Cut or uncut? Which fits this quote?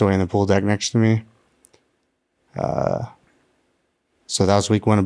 uncut